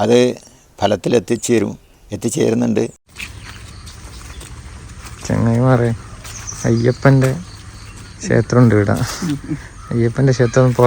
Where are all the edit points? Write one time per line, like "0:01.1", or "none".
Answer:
0:03.0